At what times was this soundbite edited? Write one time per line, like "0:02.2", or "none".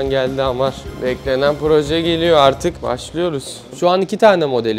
0:03.7